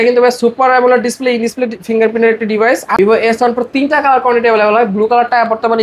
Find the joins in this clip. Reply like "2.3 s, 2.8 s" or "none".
3.0 s